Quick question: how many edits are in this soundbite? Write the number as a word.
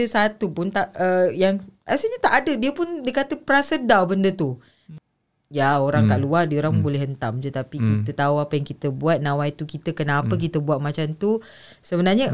one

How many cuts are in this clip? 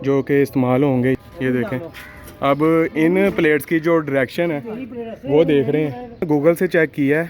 two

